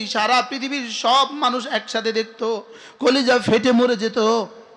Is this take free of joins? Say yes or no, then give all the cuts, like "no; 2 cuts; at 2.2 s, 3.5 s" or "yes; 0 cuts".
yes; 0 cuts